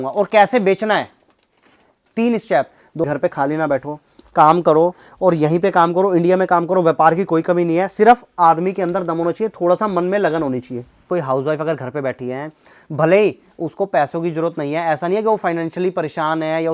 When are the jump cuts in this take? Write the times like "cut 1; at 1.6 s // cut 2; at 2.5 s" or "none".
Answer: cut 1; at 3.0 s // cut 2; at 11.1 s